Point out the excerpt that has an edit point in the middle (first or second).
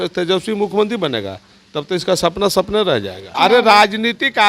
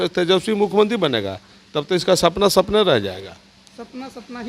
first